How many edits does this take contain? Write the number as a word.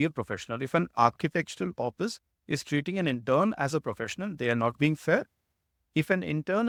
zero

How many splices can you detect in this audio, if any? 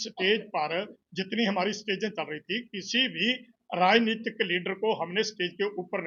zero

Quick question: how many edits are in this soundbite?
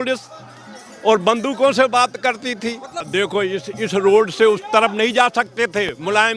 one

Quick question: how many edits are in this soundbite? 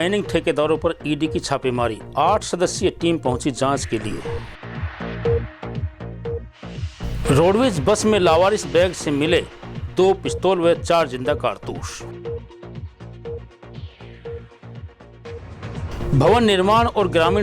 one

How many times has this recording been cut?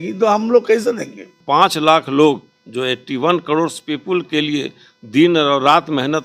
one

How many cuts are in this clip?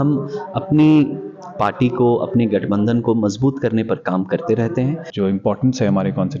one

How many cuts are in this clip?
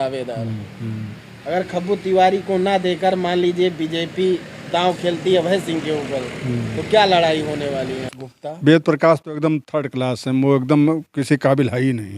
one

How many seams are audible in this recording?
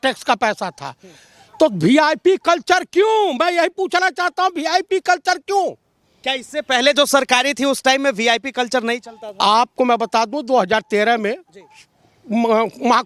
zero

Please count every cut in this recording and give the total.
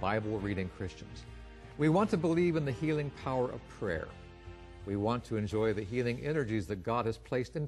one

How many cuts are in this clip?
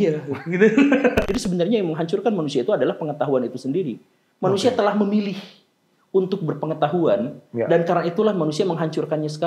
one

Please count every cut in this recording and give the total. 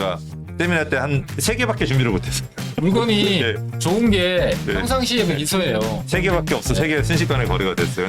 zero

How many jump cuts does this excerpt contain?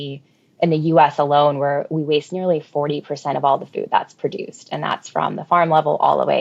zero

